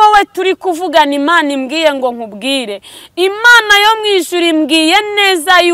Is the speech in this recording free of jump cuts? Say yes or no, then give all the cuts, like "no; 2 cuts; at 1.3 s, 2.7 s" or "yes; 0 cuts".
yes; 0 cuts